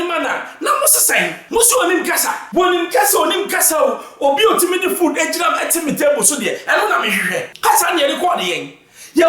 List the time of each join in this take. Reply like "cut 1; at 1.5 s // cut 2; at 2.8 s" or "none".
cut 1; at 1.4 s // cut 2; at 2.4 s // cut 3; at 7.5 s